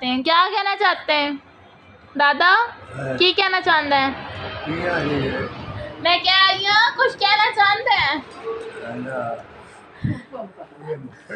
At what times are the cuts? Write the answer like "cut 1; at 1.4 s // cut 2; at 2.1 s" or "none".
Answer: cut 1; at 5.9 s // cut 2; at 10.2 s